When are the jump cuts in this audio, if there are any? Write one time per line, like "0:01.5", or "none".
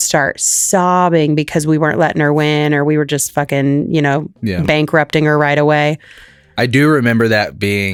none